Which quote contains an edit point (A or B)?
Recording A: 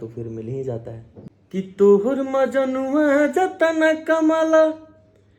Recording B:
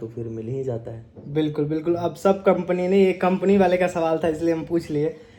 A